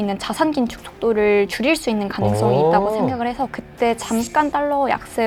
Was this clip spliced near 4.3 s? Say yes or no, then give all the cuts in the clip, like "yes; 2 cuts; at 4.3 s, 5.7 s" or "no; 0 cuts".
no; 0 cuts